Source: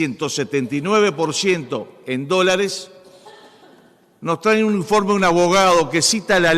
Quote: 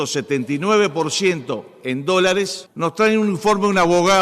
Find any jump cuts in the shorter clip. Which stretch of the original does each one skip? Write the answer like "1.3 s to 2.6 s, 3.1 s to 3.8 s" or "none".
2.9 s to 4.1 s